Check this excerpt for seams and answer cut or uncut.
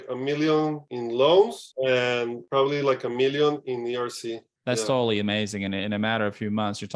uncut